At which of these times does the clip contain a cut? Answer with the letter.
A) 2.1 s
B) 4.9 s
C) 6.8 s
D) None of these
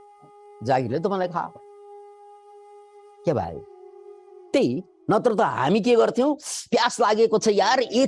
B